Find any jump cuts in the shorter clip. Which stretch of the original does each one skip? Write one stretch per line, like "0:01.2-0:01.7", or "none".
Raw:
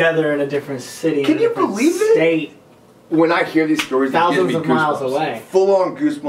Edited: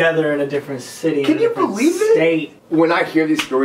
0:02.6-0:03.0